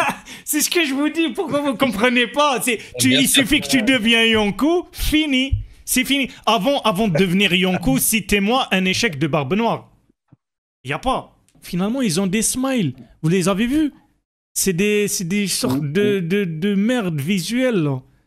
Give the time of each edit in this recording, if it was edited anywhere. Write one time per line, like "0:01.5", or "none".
0:11.6